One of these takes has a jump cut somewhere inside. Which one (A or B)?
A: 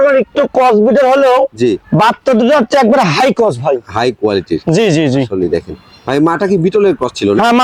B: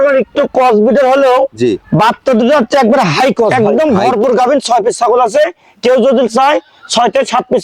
B